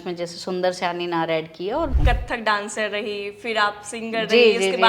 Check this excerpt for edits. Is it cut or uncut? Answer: cut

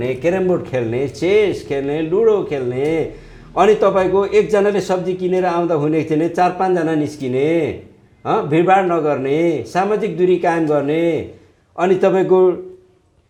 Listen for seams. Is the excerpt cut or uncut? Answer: uncut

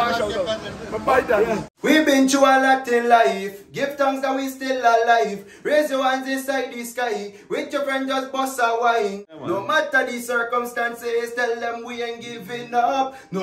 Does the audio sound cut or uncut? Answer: cut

